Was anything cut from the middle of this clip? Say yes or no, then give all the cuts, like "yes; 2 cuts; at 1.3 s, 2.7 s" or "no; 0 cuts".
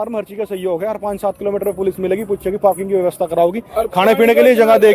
no; 0 cuts